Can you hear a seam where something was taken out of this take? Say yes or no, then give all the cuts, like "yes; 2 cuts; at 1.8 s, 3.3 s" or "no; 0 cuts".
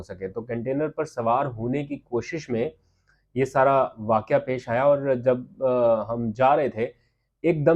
no; 0 cuts